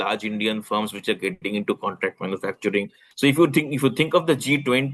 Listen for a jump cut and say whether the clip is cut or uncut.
cut